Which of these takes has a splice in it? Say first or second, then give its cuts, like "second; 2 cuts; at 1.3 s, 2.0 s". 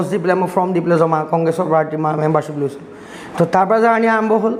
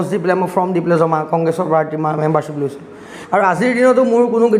second; 1 cut; at 3.1 s